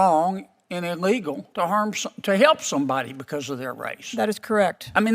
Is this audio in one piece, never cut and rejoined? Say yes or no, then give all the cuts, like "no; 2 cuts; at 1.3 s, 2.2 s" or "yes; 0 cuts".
no; 1 cut; at 1.4 s